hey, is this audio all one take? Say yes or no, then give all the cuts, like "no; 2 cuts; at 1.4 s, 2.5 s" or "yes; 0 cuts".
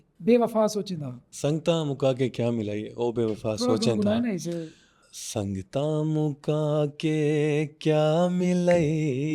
yes; 0 cuts